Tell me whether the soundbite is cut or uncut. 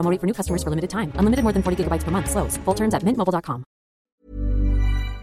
cut